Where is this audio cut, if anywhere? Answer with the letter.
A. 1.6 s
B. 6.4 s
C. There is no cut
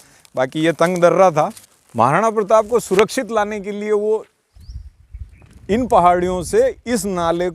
A